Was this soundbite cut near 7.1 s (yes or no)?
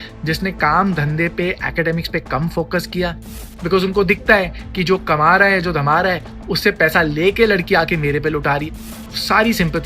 no